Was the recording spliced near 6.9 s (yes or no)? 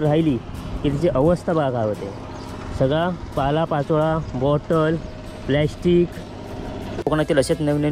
yes